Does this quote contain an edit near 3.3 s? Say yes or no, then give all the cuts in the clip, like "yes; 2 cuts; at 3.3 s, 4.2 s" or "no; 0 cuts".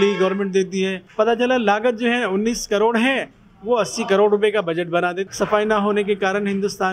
no; 2 cuts; at 1.0 s, 5.2 s